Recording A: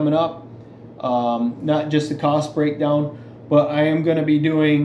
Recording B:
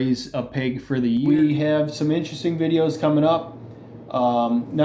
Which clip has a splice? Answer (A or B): B